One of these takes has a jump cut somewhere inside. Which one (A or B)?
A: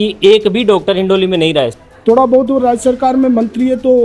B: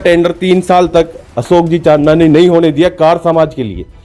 A